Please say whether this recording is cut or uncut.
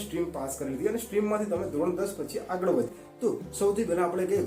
cut